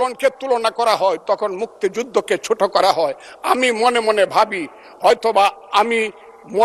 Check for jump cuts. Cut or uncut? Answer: uncut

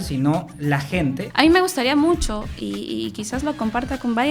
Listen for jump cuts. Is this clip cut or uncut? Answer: cut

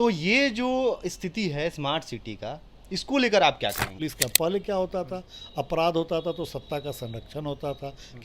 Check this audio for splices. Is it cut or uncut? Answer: cut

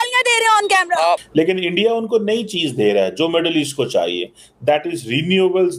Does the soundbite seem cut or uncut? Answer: cut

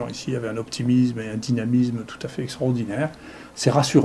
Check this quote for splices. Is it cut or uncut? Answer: uncut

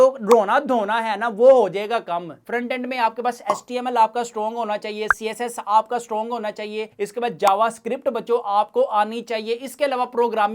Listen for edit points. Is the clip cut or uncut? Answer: cut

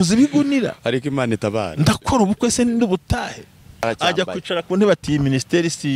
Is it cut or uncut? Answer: cut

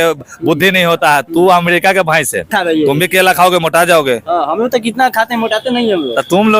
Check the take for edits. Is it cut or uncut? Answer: cut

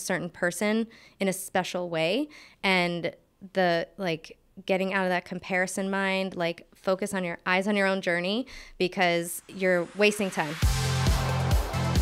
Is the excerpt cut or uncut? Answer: cut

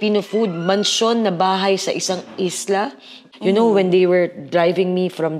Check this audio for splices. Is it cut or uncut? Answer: cut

